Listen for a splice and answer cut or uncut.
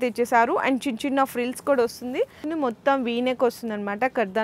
cut